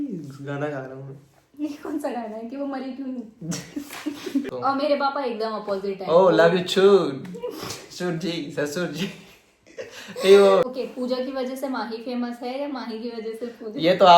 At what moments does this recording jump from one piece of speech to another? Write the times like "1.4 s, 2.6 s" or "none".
4.5 s, 10.7 s